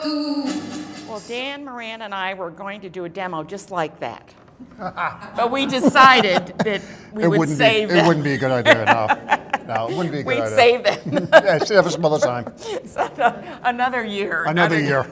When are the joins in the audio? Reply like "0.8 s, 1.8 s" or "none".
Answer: 4.6 s